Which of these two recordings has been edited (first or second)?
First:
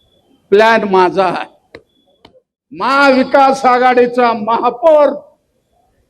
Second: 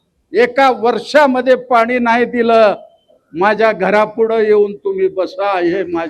first